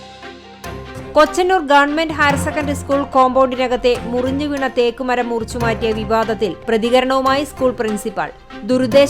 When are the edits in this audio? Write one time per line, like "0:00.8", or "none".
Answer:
0:01.1